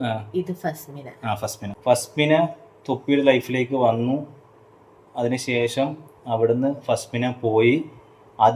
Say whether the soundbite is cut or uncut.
cut